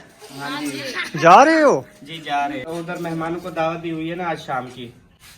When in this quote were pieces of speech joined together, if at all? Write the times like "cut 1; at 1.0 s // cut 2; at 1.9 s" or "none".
cut 1; at 2.6 s